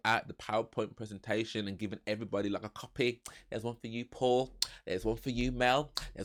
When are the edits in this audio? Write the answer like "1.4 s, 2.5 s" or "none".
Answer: none